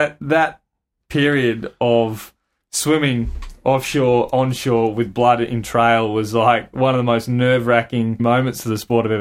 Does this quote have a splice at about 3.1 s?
no; 1 cut; at 8.2 s

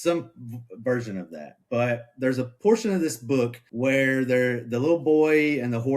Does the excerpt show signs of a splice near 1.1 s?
no; 2 cuts; at 2.5 s, 3.6 s

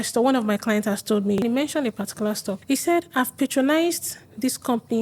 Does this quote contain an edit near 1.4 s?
yes; 2 cuts; at 1.4 s, 2.5 s

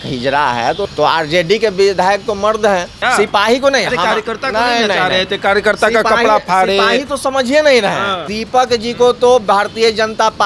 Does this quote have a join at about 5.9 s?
no; 3 cuts; at 0.9 s, 2.9 s, 8.3 s

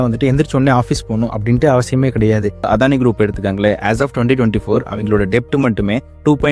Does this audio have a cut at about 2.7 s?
yes; 1 cut; at 2.7 s

